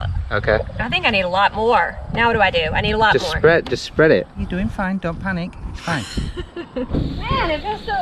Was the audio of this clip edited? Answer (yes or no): yes